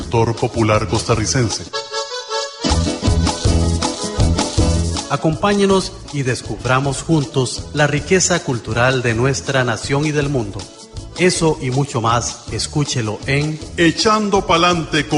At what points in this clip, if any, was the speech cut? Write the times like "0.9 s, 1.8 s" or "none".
1.7 s, 5.0 s